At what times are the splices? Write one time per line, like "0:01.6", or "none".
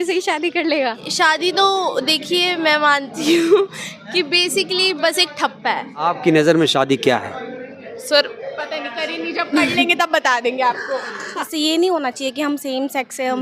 0:01.1
0:06.0
0:11.5